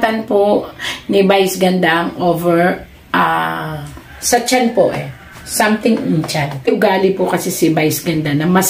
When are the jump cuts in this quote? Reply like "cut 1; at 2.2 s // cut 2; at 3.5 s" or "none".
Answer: cut 1; at 6.7 s